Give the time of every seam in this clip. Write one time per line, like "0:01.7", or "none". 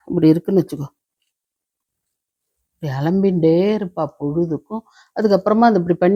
none